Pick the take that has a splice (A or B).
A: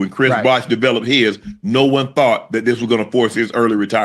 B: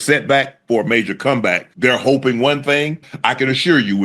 B